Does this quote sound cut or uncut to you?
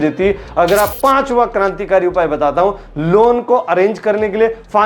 cut